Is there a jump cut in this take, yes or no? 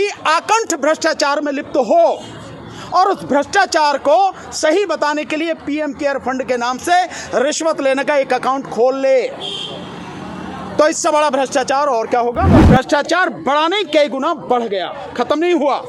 yes